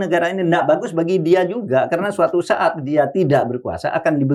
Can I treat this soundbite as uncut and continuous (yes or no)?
yes